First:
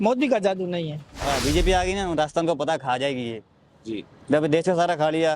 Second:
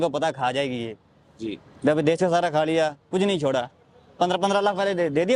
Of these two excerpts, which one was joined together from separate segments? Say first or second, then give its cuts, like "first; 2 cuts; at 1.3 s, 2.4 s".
first; 1 cut; at 1.2 s